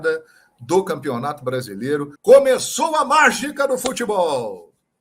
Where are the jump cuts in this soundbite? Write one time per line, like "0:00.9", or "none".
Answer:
0:02.1